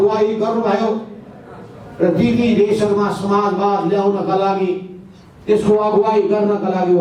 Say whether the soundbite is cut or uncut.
uncut